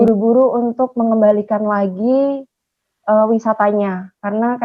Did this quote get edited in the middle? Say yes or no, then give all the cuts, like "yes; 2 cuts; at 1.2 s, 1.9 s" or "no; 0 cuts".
no; 0 cuts